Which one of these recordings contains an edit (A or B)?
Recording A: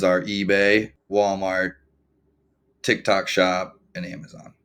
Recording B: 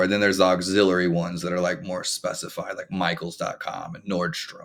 A